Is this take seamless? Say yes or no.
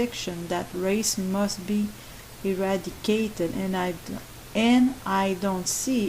no